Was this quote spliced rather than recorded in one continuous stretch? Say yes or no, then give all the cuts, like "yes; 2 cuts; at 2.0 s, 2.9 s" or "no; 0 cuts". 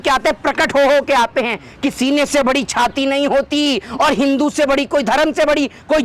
no; 0 cuts